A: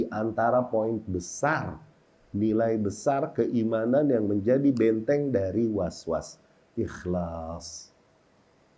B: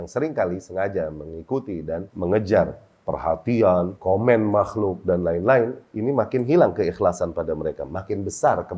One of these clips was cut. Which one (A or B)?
B